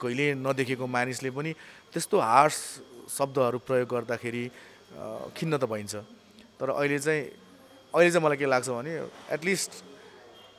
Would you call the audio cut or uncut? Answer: uncut